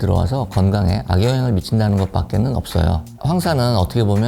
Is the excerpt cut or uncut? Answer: cut